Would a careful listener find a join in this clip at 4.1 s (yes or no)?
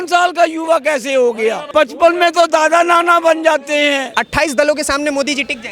yes